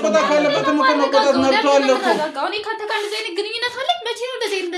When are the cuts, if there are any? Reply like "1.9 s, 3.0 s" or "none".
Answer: none